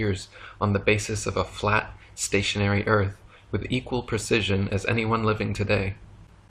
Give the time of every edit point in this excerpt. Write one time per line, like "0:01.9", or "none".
0:04.0